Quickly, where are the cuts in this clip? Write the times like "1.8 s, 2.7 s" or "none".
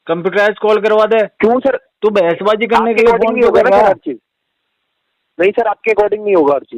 none

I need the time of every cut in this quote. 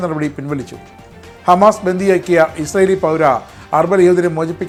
none

